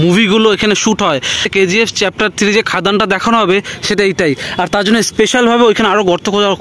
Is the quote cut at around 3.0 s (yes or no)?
no